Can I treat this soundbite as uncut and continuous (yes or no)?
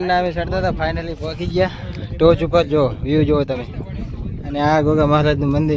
yes